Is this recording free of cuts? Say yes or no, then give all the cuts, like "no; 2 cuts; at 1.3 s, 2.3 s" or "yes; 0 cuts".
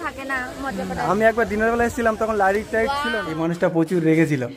no; 1 cut; at 3.2 s